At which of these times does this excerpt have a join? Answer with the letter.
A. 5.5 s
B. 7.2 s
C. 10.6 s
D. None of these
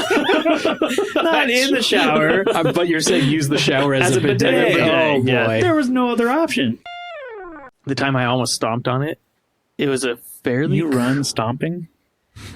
B